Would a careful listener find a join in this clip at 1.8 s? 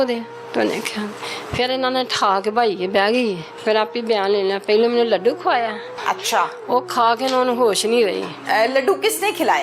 no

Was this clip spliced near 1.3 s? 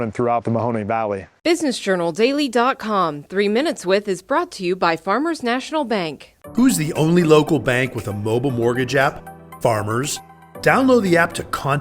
yes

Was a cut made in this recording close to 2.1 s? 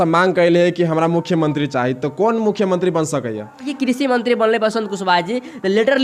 no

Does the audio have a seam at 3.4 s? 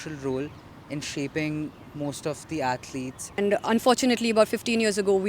yes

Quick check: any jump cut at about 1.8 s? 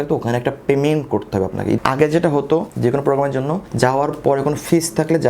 yes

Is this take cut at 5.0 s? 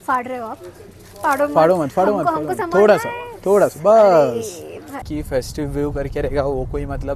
yes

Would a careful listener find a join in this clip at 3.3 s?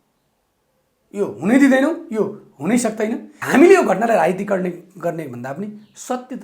yes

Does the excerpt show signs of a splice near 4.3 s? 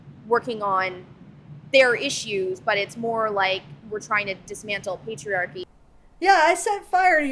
no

